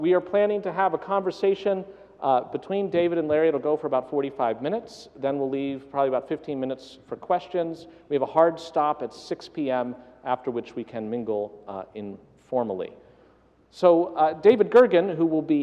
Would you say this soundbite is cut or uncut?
cut